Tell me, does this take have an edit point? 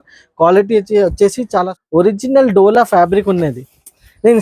yes; 1 cut; at 1.7 s

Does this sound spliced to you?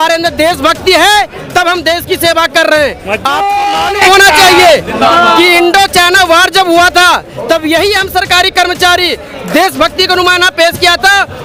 no; 0 cuts

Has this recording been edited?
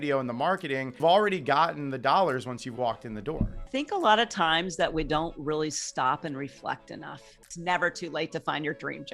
yes; 3 cuts; at 0.9 s, 3.7 s, 7.5 s

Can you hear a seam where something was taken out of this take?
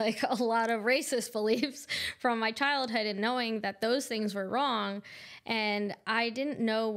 no; 0 cuts

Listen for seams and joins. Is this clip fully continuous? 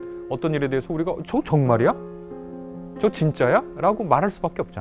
yes; 0 cuts

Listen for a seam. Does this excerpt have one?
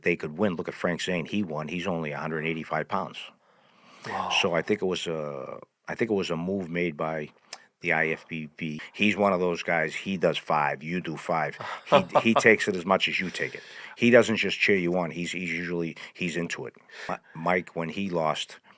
yes; 2 cuts; at 8.8 s, 17.2 s

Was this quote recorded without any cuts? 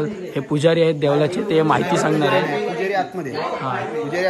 yes; 0 cuts

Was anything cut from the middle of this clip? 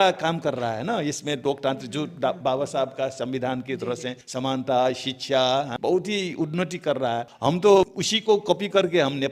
yes; 4 cuts; at 4.2 s, 5.7 s, 7.3 s, 8.0 s

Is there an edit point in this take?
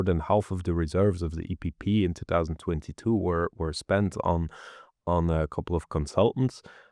no; 0 cuts

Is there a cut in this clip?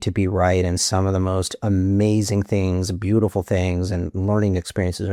no; 0 cuts

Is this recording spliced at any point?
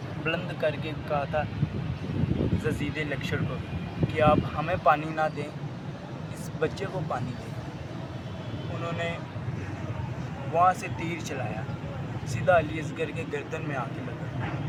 no; 0 cuts

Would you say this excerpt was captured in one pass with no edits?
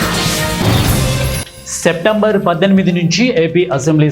no; 1 cut; at 1.4 s

